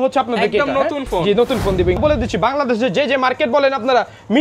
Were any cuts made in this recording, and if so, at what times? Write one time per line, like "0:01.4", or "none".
0:02.0